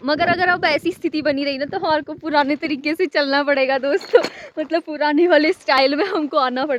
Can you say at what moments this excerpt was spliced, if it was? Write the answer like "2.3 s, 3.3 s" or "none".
none